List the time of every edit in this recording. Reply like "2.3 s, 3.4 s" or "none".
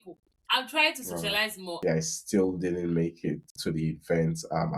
1.8 s